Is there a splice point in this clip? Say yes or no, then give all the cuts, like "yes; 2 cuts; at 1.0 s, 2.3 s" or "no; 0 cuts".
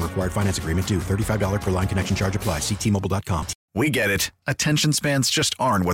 yes; 1 cut; at 3.6 s